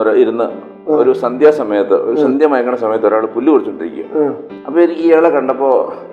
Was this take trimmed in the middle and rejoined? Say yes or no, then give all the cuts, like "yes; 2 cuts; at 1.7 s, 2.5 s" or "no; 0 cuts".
no; 0 cuts